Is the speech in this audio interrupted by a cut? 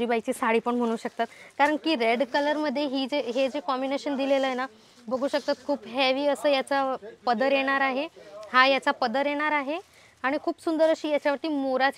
no; 0 cuts

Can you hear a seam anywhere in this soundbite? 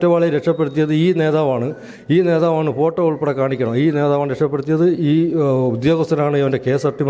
no; 0 cuts

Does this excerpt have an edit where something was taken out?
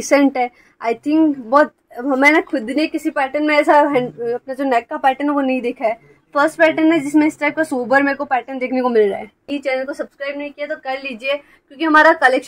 yes; 1 cut; at 9.5 s

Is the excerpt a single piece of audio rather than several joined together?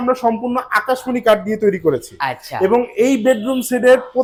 yes; 0 cuts

